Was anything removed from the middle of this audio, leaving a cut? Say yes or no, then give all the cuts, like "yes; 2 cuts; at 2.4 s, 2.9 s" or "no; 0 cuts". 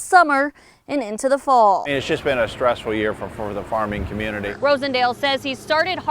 yes; 2 cuts; at 1.9 s, 4.5 s